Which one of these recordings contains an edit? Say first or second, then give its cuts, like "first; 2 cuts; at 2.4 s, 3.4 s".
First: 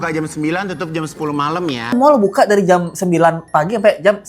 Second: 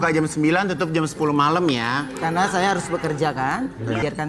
first; 1 cut; at 1.9 s